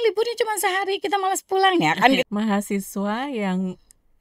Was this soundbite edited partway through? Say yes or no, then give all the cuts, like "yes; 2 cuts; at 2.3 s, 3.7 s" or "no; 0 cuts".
yes; 1 cut; at 2.2 s